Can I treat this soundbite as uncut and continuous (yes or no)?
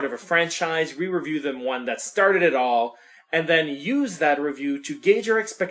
no